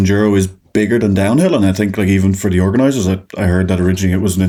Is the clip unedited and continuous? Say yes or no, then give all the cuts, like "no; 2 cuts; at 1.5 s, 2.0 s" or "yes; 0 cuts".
yes; 0 cuts